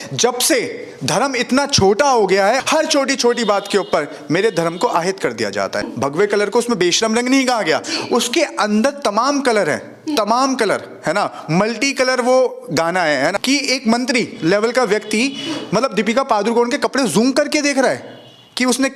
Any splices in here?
yes; 3 cuts; at 2.6 s, 5.9 s, 13.4 s

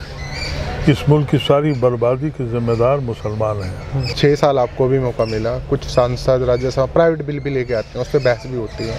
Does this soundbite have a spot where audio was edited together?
yes; 1 cut; at 4.0 s

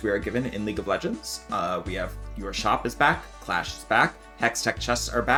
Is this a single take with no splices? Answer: yes; 0 cuts

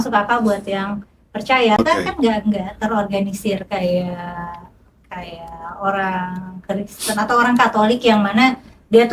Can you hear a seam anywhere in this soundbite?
yes; 1 cut; at 1.8 s

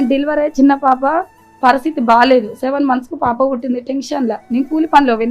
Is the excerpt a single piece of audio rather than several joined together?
yes; 0 cuts

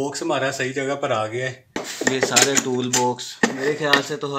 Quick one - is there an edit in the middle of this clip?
yes; 1 cut; at 1.8 s

